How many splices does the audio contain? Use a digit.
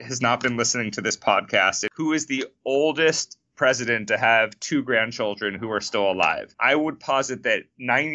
2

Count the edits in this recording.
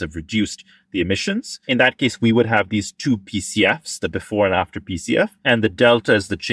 2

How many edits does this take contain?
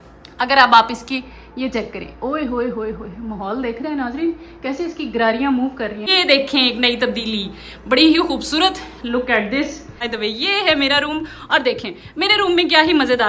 2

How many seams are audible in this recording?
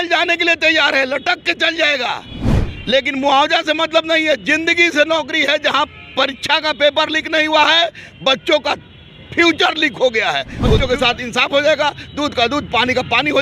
1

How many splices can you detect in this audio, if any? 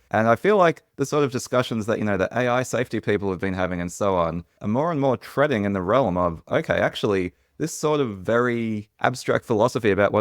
1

